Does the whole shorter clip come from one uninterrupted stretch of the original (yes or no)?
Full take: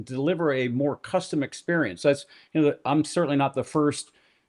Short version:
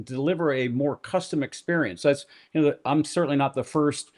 yes